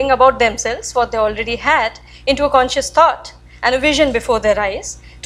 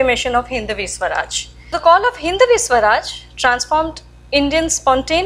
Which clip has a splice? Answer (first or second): second